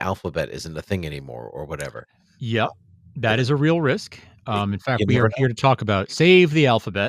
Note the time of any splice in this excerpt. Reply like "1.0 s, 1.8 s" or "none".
none